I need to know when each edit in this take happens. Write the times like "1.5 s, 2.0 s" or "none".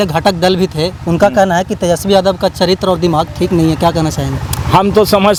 none

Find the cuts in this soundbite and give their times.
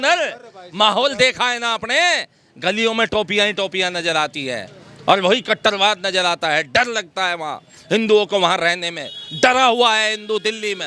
none

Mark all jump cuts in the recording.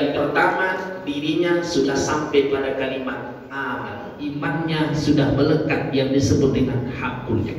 4.4 s

